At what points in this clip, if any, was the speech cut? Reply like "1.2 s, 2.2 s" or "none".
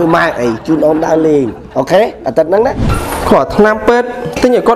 2.9 s

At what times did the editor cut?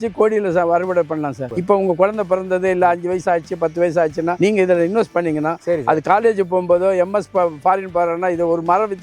1.5 s

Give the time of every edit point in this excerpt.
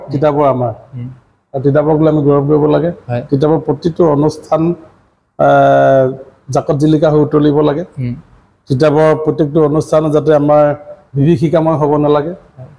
none

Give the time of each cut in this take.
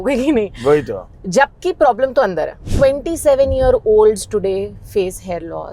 2.7 s

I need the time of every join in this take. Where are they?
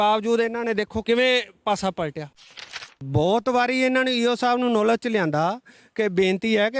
1.0 s, 2.8 s

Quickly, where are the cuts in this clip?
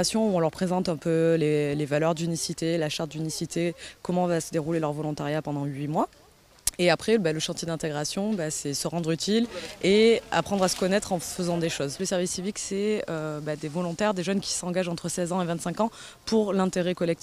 8.8 s

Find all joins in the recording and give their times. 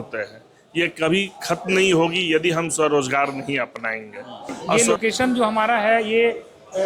4.8 s

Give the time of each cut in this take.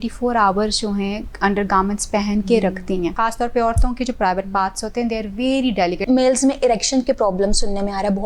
3.1 s, 6.0 s

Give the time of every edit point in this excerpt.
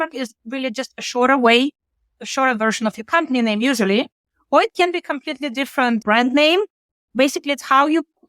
6.0 s

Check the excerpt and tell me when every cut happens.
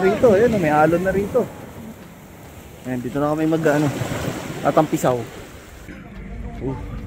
5.8 s

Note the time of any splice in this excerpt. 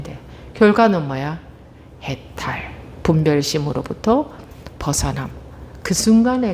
none

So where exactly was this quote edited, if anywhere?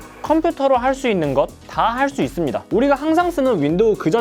2.7 s

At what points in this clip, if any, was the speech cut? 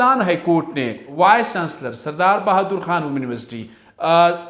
1.0 s

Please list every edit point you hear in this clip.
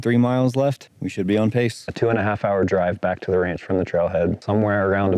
0.9 s, 1.9 s, 4.4 s

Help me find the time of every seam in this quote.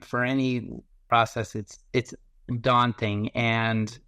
1.0 s

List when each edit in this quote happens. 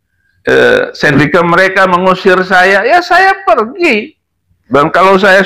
1.1 s

